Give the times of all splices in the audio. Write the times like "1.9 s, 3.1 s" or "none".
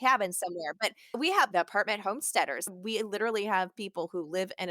1.1 s, 2.7 s